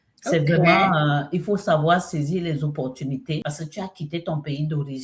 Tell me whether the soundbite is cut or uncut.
cut